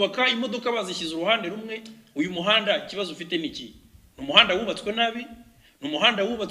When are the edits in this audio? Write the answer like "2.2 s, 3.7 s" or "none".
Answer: none